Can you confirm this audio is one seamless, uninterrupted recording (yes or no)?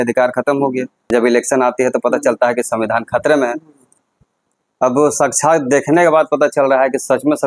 no